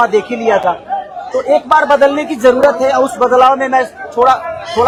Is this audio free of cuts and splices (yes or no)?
yes